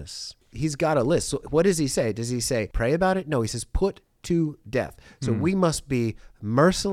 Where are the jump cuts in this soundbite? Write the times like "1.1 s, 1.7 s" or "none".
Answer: 2.7 s